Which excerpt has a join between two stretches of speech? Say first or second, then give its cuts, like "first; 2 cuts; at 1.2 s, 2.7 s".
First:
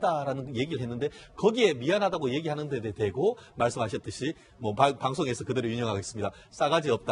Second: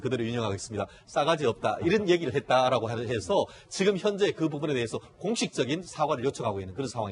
second; 1 cut; at 5.0 s